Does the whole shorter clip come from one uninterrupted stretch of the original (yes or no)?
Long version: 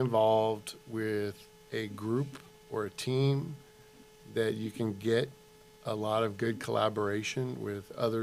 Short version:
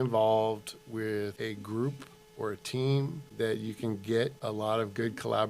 no